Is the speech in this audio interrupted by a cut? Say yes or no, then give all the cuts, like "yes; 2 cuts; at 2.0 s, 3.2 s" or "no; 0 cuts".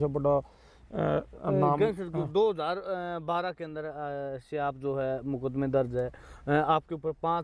no; 0 cuts